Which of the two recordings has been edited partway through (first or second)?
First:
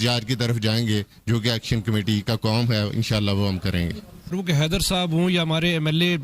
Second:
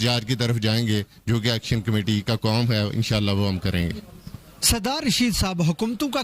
first